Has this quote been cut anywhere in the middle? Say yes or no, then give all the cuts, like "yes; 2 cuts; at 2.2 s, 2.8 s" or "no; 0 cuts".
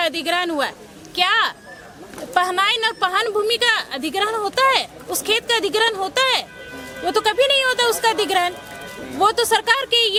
no; 0 cuts